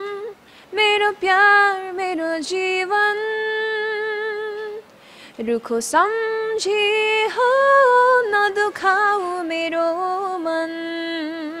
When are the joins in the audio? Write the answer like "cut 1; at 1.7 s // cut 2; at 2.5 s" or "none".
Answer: none

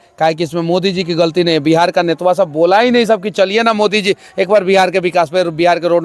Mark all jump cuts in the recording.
none

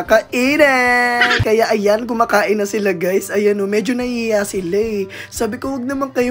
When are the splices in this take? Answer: cut 1; at 1.4 s

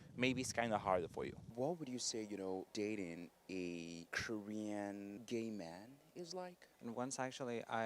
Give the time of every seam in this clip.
cut 1; at 1.4 s // cut 2; at 6.6 s

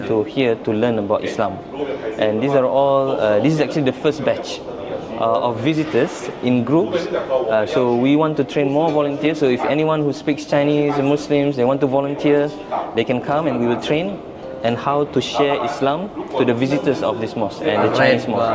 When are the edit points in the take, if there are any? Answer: none

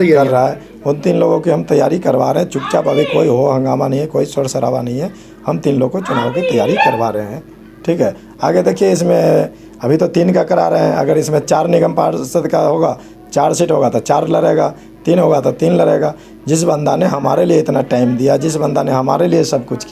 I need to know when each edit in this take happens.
none

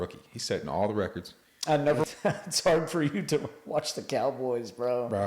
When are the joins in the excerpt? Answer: cut 1; at 2.0 s

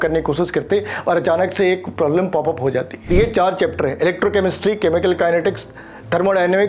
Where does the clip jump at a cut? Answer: cut 1; at 3.1 s

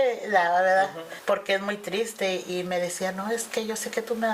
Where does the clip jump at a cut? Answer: cut 1; at 1.1 s // cut 2; at 2.5 s

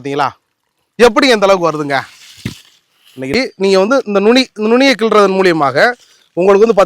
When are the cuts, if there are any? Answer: cut 1; at 3.3 s

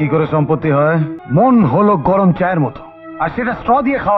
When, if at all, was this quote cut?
cut 1; at 1.2 s

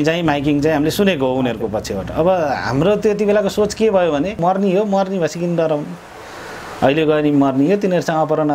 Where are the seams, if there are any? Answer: cut 1; at 4.4 s

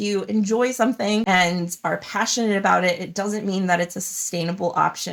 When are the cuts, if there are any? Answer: none

